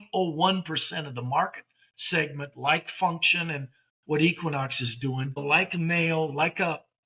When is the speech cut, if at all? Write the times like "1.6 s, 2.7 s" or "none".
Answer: 5.4 s